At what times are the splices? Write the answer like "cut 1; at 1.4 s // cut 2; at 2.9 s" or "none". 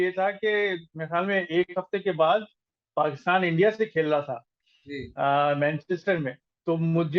none